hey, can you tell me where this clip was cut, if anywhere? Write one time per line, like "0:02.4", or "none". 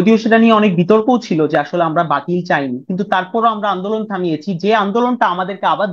none